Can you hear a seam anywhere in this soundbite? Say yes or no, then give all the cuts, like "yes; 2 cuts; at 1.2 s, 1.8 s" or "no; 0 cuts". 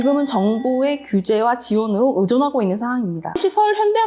no; 0 cuts